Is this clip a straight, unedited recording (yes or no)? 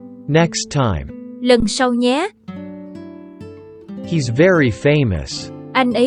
yes